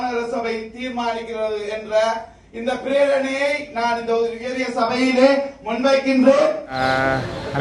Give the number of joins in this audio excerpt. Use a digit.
1